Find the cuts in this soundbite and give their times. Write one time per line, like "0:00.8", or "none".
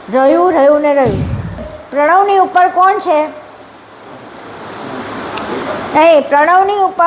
0:01.6